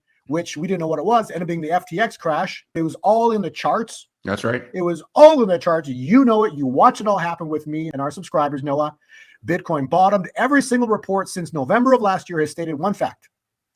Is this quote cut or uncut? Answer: cut